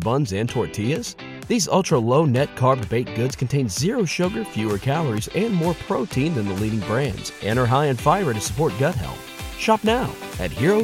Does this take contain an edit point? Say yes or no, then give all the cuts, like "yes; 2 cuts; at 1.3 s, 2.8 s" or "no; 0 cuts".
no; 0 cuts